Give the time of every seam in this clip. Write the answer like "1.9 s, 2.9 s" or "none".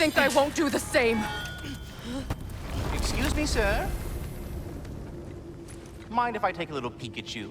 2.8 s